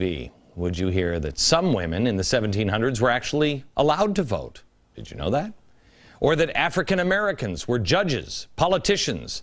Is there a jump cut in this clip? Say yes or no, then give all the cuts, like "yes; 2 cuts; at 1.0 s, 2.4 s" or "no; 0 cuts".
yes; 1 cut; at 4.0 s